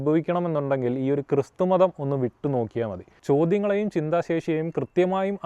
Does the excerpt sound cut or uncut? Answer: cut